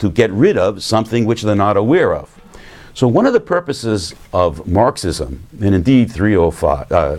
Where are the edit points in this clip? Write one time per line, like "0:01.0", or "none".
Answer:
0:05.1

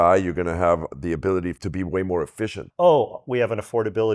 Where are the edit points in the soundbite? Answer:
0:02.6

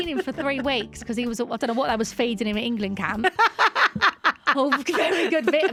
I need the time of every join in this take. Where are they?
none

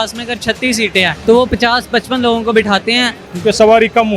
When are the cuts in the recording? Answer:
0:01.2
0:03.2

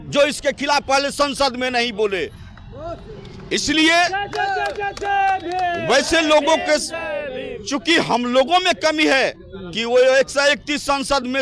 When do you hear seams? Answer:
none

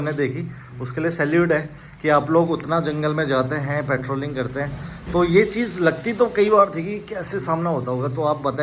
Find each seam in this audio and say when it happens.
none

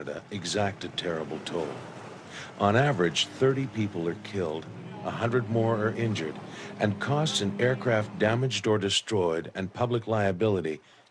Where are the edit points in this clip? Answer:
none

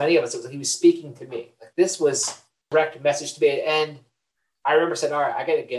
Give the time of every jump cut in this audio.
0:02.7

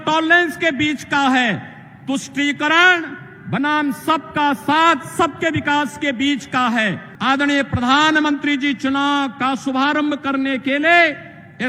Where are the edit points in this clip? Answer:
0:07.1

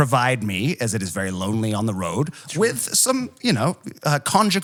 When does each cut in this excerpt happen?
none

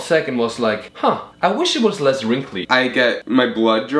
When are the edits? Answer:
0:01.0
0:02.7

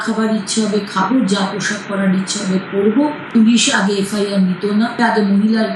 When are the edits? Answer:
0:03.3
0:05.0

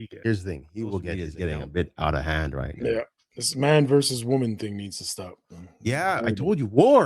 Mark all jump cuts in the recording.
0:01.3

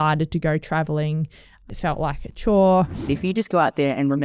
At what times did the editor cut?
0:01.7
0:03.0

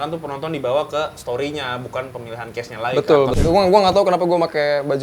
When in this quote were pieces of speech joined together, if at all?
0:03.4

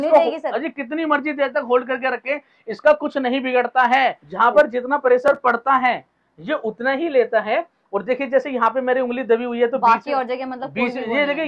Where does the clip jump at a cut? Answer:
0:04.2

